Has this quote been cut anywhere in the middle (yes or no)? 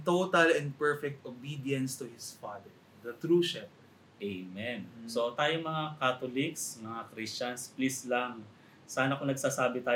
yes